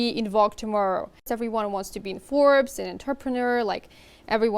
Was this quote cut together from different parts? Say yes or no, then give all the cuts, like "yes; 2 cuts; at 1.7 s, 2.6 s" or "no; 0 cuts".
yes; 1 cut; at 1.3 s